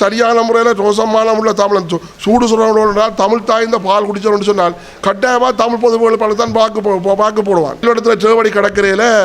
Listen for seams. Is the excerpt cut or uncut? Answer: cut